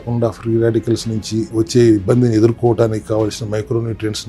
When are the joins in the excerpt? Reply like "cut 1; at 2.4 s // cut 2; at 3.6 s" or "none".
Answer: cut 1; at 1.5 s